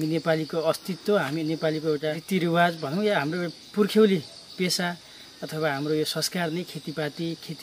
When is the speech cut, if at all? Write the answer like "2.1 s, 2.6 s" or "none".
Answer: 2.2 s